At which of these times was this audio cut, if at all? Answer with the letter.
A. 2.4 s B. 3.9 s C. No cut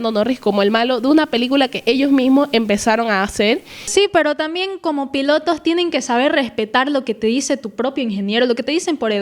B